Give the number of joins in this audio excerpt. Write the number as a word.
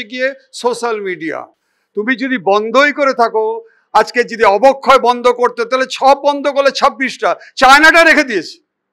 zero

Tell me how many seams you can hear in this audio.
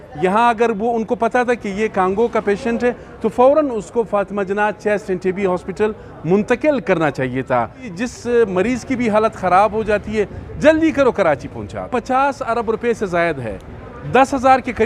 two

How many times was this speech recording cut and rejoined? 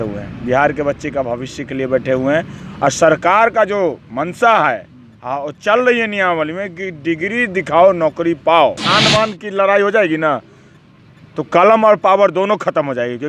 one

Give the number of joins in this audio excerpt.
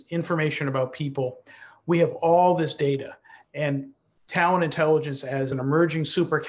one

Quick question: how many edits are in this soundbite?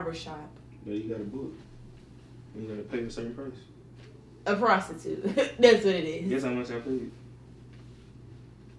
zero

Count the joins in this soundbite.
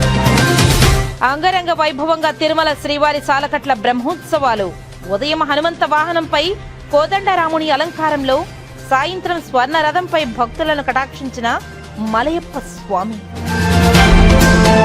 one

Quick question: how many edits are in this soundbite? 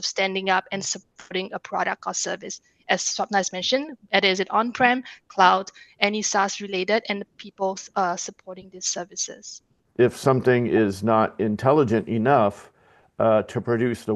one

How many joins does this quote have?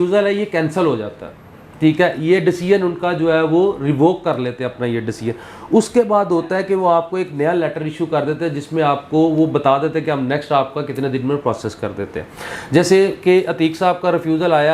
zero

